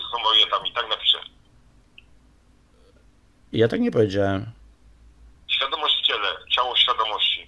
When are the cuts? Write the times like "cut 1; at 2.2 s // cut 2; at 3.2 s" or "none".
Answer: none